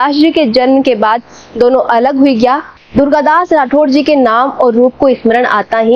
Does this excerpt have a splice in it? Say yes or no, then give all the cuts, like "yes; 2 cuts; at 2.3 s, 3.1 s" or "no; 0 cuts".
yes; 1 cut; at 2.7 s